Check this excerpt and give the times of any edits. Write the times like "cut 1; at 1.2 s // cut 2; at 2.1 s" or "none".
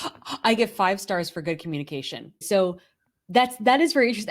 cut 1; at 2.4 s